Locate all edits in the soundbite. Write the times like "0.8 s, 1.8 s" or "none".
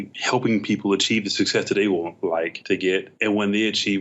2.6 s